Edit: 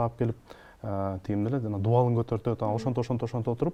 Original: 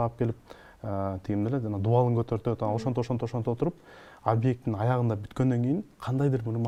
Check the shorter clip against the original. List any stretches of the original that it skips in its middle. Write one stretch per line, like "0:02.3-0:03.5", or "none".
none